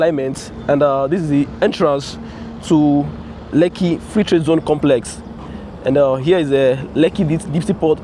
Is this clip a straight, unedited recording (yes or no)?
yes